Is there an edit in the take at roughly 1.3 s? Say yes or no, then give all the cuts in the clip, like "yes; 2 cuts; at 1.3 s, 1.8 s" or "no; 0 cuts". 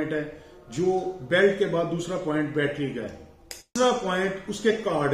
no; 1 cut; at 3.7 s